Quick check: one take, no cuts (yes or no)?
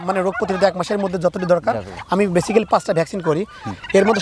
yes